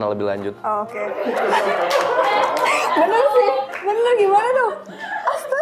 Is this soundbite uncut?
yes; 0 cuts

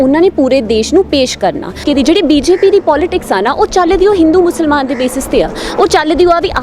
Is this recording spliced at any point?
yes; 1 cut; at 1.8 s

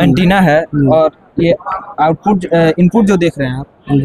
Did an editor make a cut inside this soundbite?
no; 0 cuts

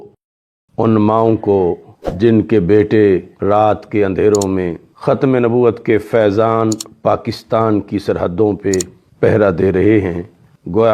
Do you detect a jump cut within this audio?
no; 0 cuts

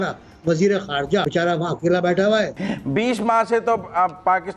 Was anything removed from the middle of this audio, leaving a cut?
yes; 2 cuts; at 1.3 s, 2.7 s

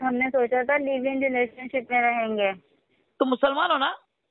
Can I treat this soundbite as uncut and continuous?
yes; 0 cuts

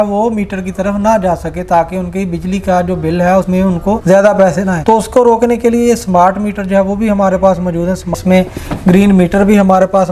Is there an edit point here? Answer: yes; 1 cut; at 8.1 s

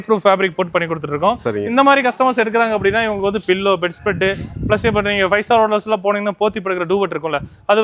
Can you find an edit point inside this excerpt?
no; 0 cuts

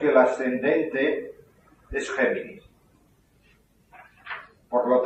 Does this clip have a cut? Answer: no; 0 cuts

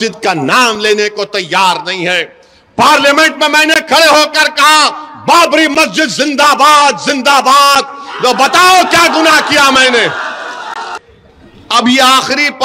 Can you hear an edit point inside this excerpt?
yes; 1 cut; at 10.9 s

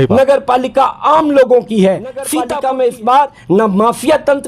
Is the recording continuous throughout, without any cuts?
no; 1 cut; at 2.3 s

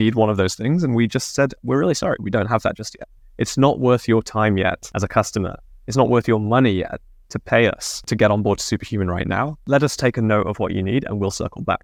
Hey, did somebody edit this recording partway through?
no; 0 cuts

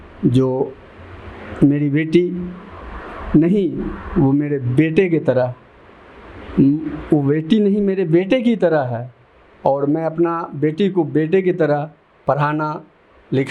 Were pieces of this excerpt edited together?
no; 0 cuts

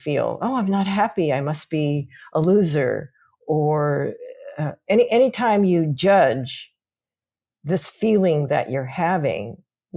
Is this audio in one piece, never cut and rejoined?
yes; 0 cuts

